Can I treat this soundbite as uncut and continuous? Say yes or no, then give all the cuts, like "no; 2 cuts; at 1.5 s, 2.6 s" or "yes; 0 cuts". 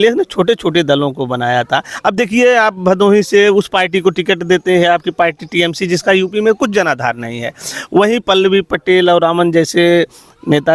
yes; 0 cuts